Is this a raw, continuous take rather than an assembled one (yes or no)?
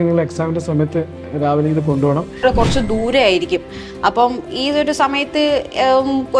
no